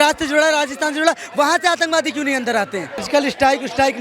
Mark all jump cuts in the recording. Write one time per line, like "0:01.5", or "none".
0:03.0